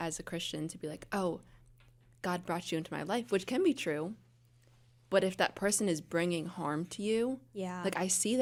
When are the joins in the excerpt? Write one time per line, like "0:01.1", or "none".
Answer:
none